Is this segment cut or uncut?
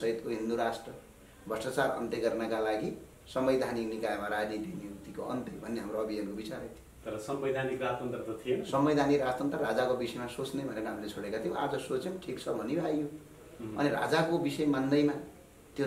uncut